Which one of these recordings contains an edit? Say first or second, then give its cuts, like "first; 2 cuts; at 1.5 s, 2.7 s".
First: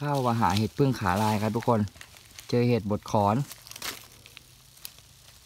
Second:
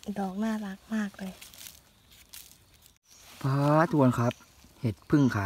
second; 1 cut; at 2.9 s